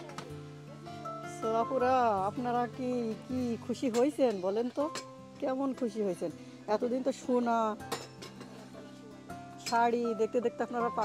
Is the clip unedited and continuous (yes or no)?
yes